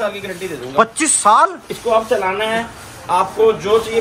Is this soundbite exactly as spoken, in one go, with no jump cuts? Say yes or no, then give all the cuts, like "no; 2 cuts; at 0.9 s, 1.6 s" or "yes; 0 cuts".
yes; 0 cuts